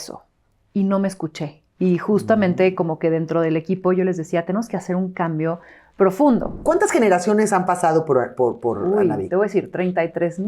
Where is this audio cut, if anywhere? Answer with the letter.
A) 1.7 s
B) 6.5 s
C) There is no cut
B